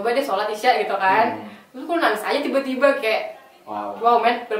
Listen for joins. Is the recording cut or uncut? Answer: uncut